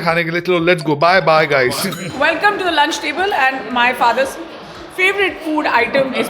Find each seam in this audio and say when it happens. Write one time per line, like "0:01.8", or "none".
none